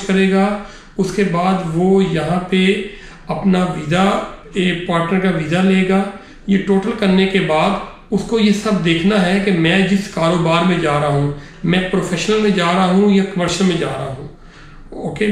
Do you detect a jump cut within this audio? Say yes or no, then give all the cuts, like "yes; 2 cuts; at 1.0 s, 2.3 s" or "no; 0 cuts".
no; 0 cuts